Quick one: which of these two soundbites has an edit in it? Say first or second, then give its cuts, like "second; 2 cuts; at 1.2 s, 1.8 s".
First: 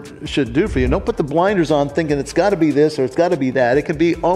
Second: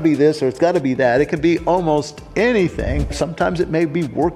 second; 1 cut; at 3.1 s